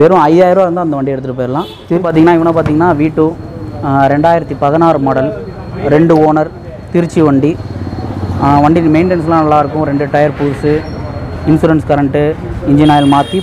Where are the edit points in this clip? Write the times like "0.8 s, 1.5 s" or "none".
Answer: 1.9 s